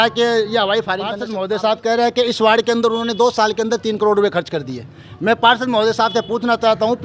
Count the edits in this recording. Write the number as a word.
one